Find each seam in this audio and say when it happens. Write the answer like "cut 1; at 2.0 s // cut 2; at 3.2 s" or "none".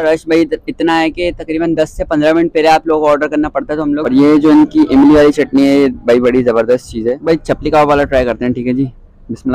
cut 1; at 4.0 s // cut 2; at 7.2 s